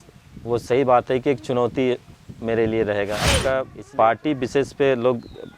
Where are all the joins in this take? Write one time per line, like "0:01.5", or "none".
0:03.3